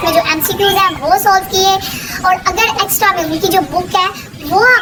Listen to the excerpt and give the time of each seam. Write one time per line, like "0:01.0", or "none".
none